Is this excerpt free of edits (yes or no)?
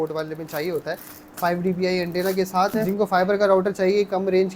no